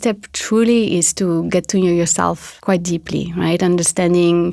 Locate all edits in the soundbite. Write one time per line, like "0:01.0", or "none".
0:02.5